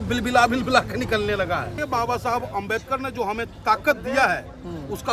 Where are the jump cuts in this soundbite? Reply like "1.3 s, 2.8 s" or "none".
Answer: 1.8 s